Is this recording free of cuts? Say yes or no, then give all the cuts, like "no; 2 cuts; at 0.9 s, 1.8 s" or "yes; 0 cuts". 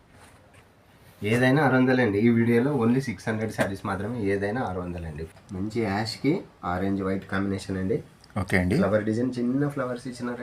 no; 1 cut; at 5.2 s